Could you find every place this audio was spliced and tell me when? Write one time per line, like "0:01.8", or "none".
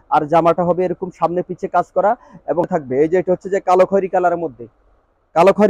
0:02.7